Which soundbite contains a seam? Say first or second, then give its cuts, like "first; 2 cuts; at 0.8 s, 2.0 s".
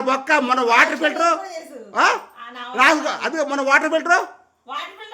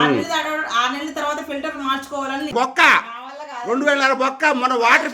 second; 1 cut; at 2.5 s